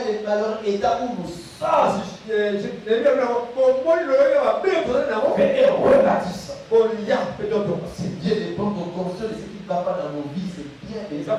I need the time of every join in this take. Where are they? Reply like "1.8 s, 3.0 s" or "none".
none